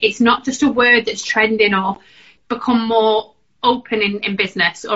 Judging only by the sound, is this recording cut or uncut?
cut